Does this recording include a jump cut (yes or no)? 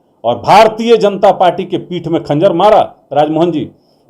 no